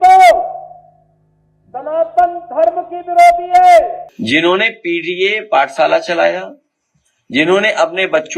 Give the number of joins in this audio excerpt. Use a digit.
1